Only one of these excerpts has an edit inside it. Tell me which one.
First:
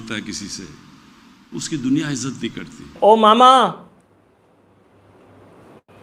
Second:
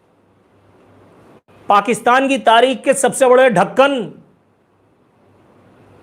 first; 1 cut; at 2.9 s

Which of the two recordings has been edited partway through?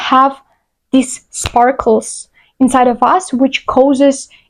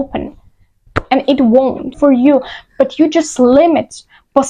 second; 1 cut; at 1.9 s

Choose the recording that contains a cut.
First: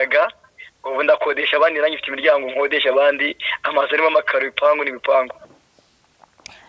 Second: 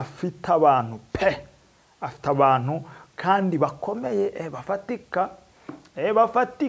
first; 1 cut; at 5.4 s

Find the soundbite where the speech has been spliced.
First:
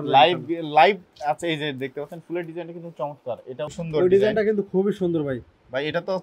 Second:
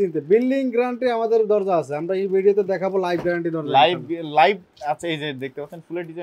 first; 1 cut; at 3.7 s

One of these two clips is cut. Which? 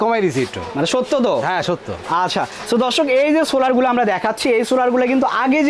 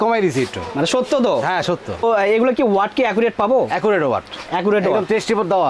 second; 1 cut; at 2.0 s

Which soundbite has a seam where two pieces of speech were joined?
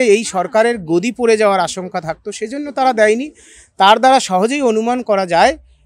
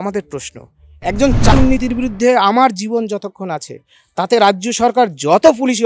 second; 1 cut; at 1.5 s

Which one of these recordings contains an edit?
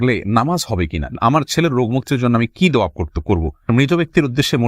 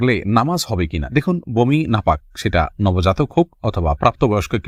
first; 2 cuts; at 1.1 s, 3.7 s

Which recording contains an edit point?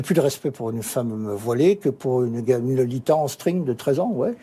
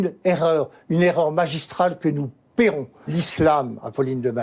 second; 1 cut; at 3.1 s

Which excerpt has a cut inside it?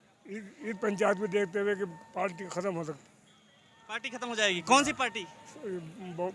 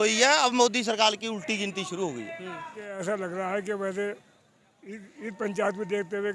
second; 1 cut; at 3.0 s

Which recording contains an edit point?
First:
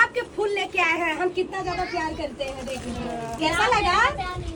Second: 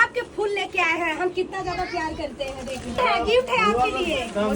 second; 1 cut; at 3.0 s

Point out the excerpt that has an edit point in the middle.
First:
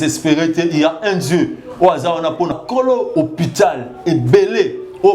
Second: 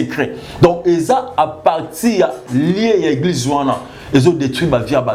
first; 1 cut; at 2.5 s

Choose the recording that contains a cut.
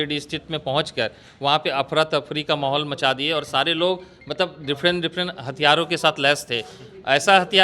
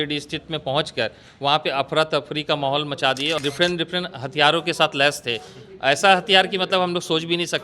second; 1 cut; at 3.4 s

